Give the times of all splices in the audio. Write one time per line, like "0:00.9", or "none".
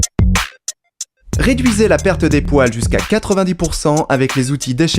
0:01.4